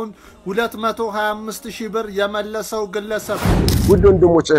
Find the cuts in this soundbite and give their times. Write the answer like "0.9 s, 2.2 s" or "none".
3.6 s